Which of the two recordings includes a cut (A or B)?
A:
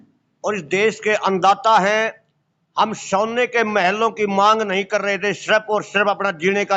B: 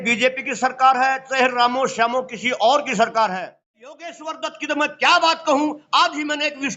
B